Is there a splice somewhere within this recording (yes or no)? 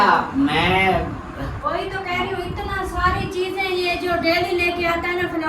yes